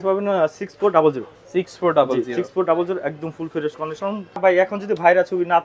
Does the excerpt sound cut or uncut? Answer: cut